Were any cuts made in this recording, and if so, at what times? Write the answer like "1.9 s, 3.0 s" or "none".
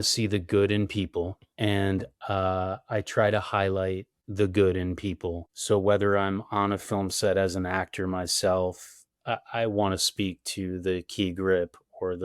1.4 s